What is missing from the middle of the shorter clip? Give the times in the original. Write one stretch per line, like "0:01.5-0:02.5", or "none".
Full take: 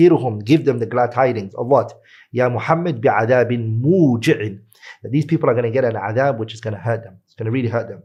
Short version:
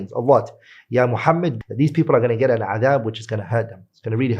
0:02.9-0:04.9